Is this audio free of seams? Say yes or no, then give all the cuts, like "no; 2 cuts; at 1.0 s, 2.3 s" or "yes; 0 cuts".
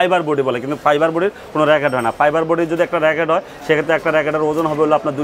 yes; 0 cuts